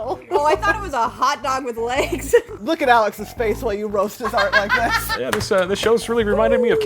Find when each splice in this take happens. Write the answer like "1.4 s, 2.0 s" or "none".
2.6 s, 5.2 s